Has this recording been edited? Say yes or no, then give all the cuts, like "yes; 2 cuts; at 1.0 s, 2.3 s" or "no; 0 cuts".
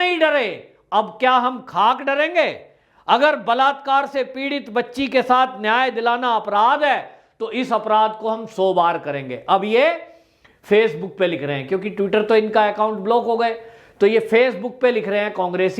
no; 0 cuts